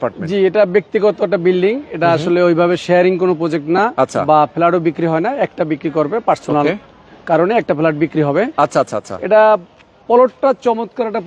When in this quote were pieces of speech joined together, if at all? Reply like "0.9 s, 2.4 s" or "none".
none